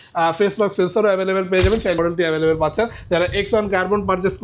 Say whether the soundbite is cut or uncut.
cut